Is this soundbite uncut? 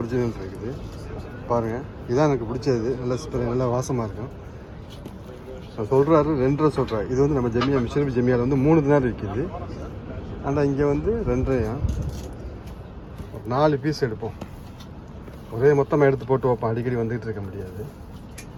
yes; 0 cuts

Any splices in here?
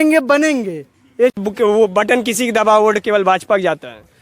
yes; 1 cut; at 1.4 s

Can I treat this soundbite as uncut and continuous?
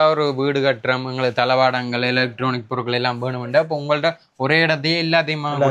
yes; 0 cuts

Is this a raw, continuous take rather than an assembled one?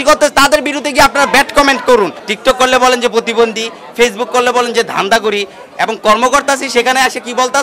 no; 1 cut; at 2.2 s

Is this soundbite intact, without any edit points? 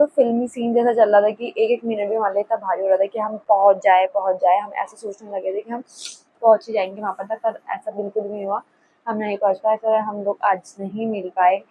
yes; 0 cuts

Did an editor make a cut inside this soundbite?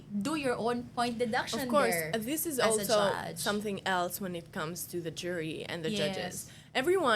no; 0 cuts

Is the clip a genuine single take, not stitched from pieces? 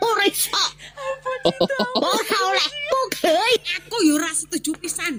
yes; 0 cuts

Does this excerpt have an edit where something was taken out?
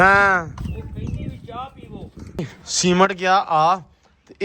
yes; 1 cut; at 2.6 s

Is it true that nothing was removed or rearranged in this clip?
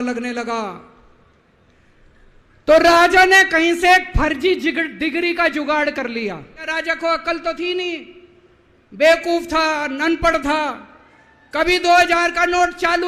no; 1 cut; at 6.7 s

